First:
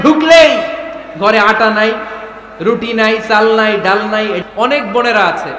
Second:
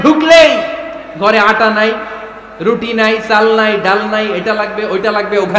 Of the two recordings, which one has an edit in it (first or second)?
first